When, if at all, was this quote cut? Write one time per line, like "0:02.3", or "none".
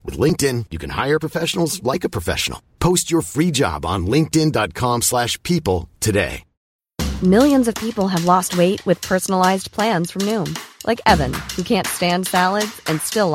0:06.5